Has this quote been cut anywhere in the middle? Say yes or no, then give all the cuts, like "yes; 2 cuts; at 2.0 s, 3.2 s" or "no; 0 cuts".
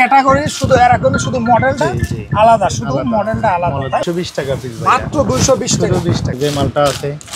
yes; 2 cuts; at 4.0 s, 6.3 s